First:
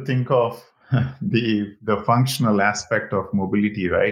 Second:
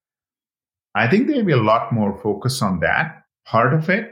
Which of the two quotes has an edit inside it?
second; 1 cut; at 3.2 s

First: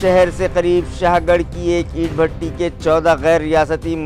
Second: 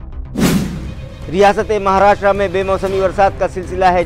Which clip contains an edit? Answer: second; 1 cut; at 1.2 s

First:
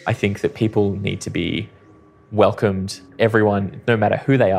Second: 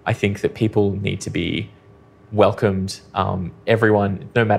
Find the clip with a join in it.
first; 1 cut; at 3.0 s

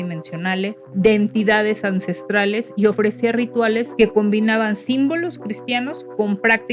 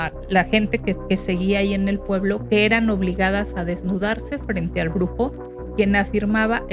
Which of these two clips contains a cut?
first; 2 cuts; at 0.8 s, 3.9 s

